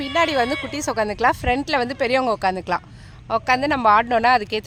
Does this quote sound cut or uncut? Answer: uncut